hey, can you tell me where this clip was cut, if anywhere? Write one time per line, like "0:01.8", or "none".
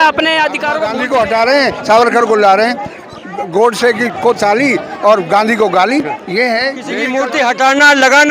0:00.8
0:07.1